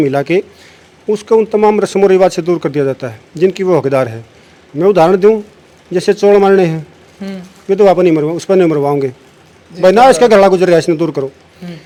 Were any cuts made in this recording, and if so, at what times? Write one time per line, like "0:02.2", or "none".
none